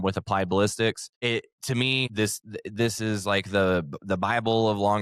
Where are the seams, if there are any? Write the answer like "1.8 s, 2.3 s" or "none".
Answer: 1.1 s, 2.1 s